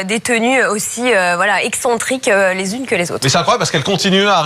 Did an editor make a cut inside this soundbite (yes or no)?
yes